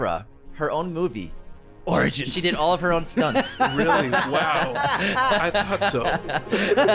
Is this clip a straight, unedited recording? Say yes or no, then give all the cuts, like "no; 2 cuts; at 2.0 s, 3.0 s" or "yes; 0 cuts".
yes; 0 cuts